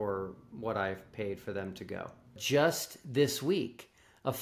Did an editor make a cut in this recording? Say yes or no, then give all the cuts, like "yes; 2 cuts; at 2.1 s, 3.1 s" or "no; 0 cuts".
yes; 1 cut; at 2.4 s